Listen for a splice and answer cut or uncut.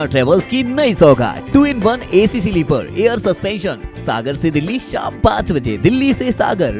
uncut